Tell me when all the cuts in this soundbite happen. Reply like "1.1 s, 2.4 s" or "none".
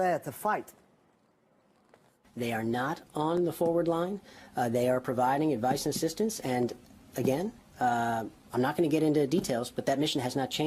7.7 s